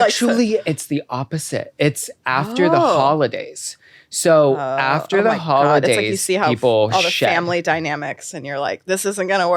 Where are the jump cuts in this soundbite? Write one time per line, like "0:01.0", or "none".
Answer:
none